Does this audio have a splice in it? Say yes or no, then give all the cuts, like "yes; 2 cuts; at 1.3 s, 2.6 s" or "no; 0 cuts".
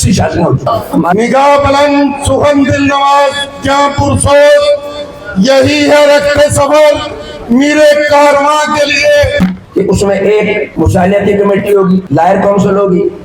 yes; 2 cuts; at 1.1 s, 9.3 s